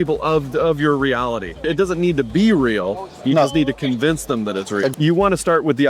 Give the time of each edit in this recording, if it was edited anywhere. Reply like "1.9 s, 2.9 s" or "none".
1.7 s, 4.9 s